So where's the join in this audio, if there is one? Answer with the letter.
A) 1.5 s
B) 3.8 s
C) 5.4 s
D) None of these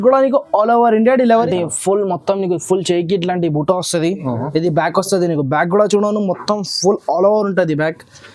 A